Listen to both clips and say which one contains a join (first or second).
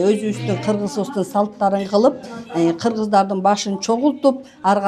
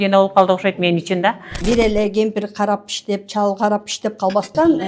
second